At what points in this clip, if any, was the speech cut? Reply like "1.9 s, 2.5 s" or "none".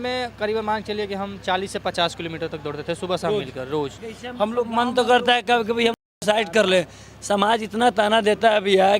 4.0 s